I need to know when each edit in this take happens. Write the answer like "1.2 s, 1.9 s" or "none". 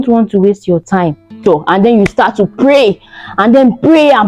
1.4 s